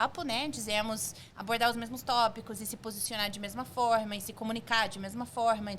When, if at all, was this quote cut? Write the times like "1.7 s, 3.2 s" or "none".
none